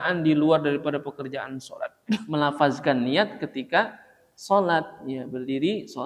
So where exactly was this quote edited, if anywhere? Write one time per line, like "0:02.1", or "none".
0:02.2